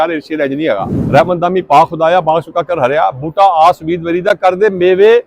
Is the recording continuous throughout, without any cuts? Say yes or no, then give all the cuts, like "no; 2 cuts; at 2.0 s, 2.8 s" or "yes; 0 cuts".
no; 1 cut; at 0.9 s